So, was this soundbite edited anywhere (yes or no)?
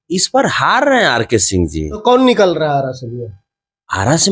yes